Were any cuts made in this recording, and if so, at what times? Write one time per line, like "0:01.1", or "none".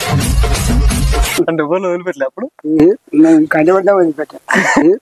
0:01.4